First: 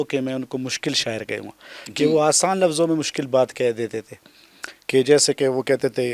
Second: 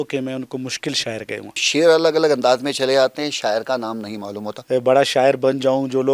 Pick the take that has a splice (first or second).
second